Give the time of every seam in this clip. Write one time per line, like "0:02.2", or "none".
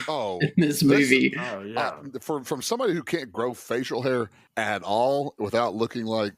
0:04.4